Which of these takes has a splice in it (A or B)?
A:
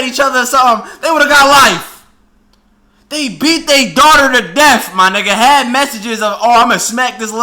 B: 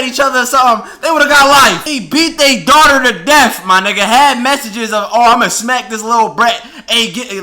B